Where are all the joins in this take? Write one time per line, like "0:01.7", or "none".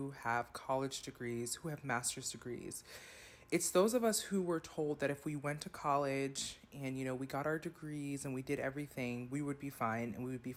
none